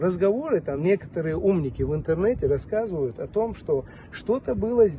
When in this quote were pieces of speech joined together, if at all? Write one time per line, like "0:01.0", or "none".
none